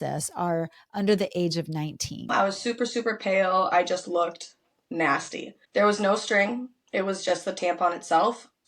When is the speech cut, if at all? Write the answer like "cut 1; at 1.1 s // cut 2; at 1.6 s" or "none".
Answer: cut 1; at 2.3 s // cut 2; at 5.5 s